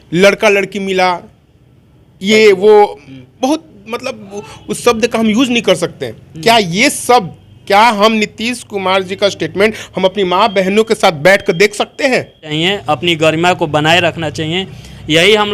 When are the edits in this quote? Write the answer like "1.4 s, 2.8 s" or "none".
12.5 s